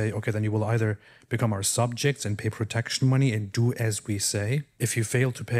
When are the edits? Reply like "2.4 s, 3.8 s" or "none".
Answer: 4.7 s

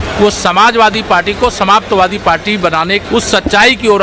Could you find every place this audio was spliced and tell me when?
3.0 s

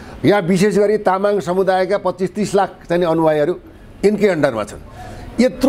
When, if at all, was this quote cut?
none

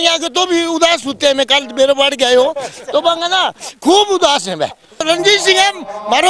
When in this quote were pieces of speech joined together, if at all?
5.0 s

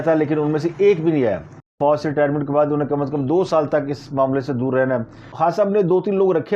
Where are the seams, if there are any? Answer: 1.7 s, 5.2 s

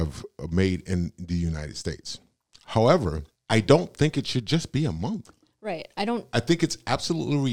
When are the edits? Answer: 3.3 s

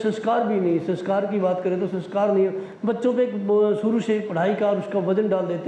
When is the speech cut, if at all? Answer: none

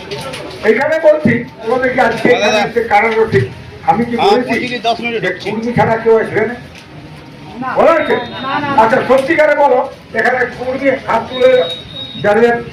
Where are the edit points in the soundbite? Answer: 1.7 s

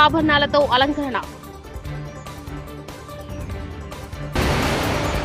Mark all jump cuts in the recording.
none

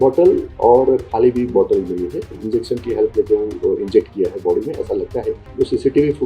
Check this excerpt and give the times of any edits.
2.4 s, 5.4 s

